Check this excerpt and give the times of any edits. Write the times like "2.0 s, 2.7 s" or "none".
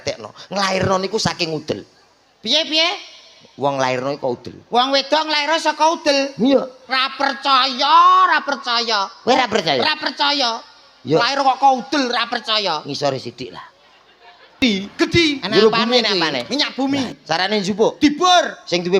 14.6 s

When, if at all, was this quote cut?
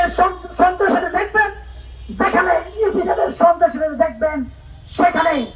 none

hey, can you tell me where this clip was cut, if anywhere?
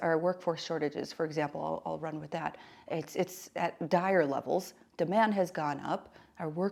none

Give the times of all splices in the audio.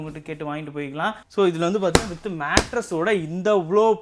1.2 s

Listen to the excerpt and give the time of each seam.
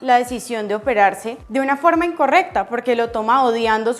1.3 s

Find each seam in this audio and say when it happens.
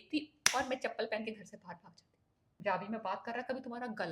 2.6 s

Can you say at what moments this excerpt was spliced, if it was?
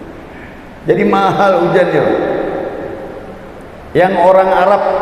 none

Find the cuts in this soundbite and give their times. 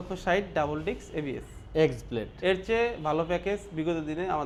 none

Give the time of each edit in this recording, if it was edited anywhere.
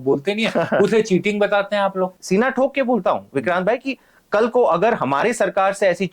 2.2 s

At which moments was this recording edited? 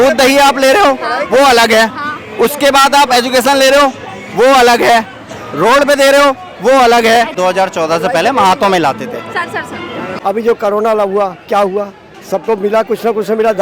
7.3 s, 10.1 s

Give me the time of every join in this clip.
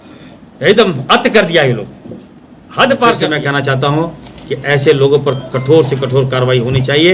3.2 s

